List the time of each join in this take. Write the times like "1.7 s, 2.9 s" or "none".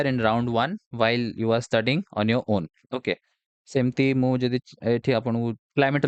none

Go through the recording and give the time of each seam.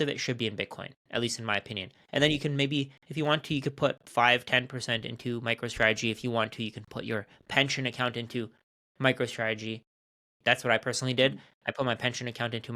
none

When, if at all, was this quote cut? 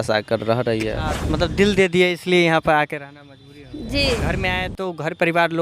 1.2 s, 4.3 s

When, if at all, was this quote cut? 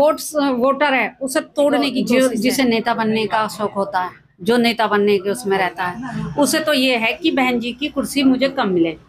2.0 s

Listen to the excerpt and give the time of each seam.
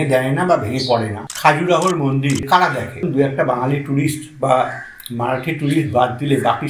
1.2 s, 2.7 s

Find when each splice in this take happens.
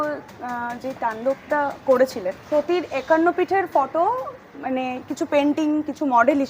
2.4 s

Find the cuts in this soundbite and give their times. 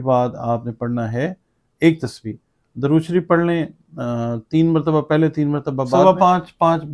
6.0 s

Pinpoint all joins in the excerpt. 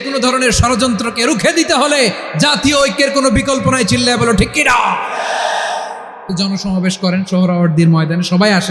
6.3 s

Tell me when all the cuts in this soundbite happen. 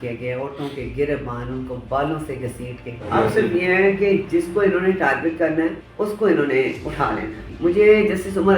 3.0 s, 5.8 s, 7.5 s

